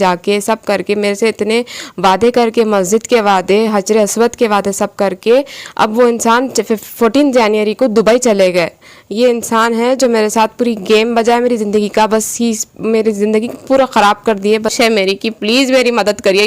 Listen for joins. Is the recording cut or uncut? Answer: cut